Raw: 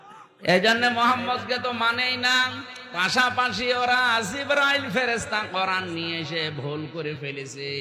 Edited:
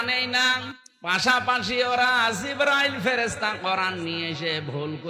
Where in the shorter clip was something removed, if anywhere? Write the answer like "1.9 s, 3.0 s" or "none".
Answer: none